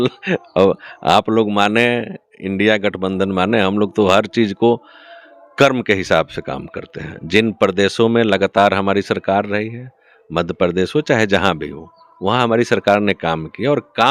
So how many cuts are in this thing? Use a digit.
0